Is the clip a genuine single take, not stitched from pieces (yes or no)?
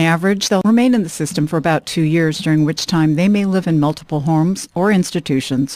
yes